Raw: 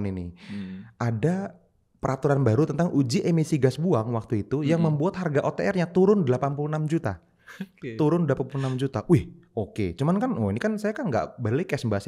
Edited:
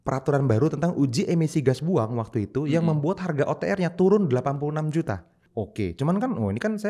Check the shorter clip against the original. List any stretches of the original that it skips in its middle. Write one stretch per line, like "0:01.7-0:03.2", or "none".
0:07.4-0:09.4